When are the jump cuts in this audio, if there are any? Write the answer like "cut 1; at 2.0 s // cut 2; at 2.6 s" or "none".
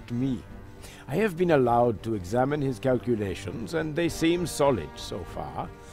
cut 1; at 2.5 s